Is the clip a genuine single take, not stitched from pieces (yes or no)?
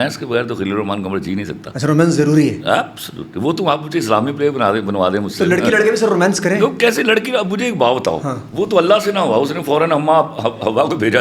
yes